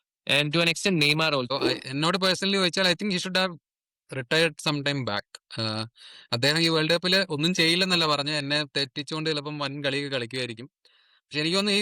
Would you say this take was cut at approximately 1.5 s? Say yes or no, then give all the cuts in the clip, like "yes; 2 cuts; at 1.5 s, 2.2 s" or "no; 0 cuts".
yes; 1 cut; at 1.5 s